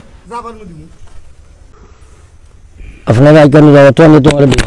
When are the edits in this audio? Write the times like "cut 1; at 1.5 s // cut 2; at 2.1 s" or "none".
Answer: cut 1; at 1.7 s